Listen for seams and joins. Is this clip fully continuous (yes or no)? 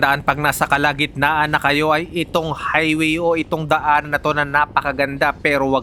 yes